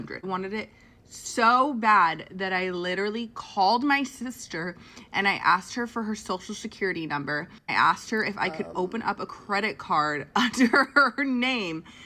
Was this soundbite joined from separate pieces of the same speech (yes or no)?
no